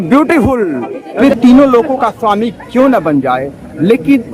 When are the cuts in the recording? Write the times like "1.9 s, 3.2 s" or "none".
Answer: 1.1 s